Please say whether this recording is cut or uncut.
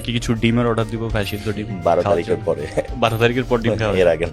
cut